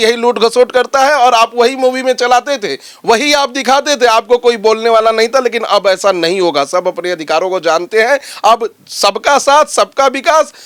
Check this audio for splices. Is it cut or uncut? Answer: uncut